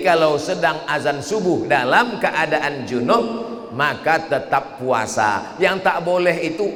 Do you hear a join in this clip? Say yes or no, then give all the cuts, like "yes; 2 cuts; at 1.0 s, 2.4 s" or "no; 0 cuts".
no; 0 cuts